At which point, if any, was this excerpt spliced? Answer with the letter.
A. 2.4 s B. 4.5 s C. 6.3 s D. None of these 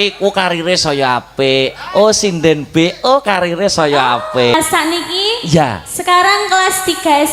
B